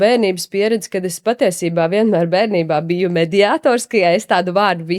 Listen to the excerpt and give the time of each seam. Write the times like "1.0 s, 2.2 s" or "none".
none